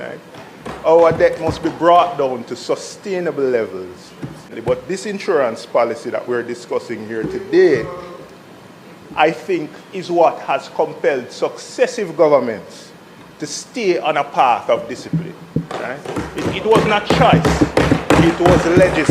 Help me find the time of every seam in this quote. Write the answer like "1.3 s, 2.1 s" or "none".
4.5 s